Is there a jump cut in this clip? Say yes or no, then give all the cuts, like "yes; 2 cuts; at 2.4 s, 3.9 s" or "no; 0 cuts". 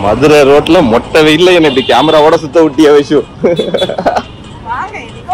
no; 0 cuts